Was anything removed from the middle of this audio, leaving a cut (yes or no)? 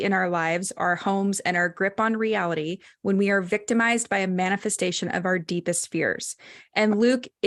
no